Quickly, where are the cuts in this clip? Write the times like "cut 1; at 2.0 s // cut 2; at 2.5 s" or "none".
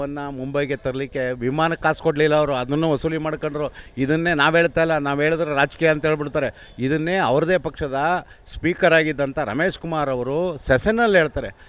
none